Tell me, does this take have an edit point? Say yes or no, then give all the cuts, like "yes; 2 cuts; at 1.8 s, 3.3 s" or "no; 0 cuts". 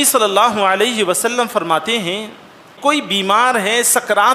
yes; 1 cut; at 2.7 s